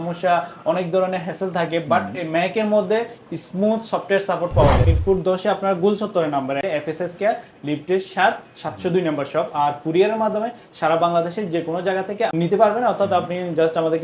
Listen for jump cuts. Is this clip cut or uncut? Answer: cut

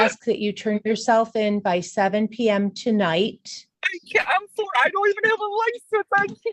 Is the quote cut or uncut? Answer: uncut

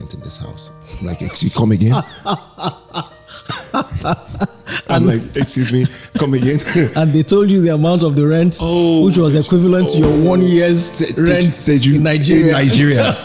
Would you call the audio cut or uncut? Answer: uncut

